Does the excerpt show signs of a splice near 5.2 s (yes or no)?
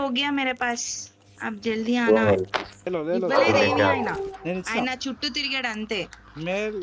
no